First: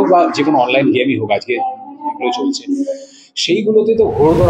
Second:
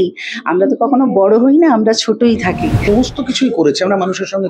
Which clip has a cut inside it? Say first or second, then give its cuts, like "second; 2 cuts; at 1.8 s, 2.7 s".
second; 1 cut; at 2.8 s